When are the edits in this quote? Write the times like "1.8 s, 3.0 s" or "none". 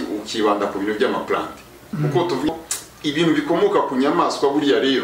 2.5 s